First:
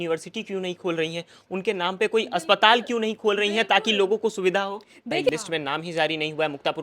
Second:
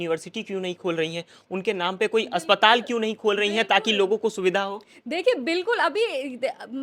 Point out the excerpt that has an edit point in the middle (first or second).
first